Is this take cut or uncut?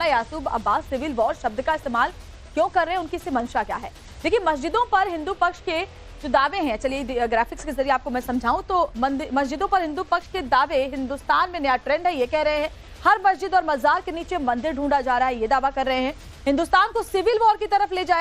uncut